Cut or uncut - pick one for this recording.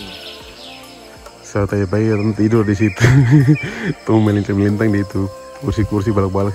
uncut